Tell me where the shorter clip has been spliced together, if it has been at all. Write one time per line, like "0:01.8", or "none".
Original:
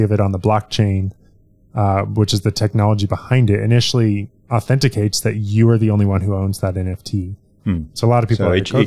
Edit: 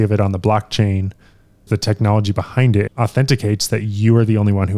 0:01.7
0:02.9